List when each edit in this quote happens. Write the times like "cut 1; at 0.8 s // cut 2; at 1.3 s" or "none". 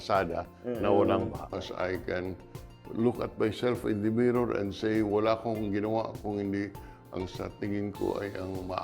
cut 1; at 1.5 s